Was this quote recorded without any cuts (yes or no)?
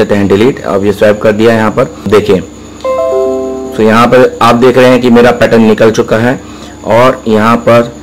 no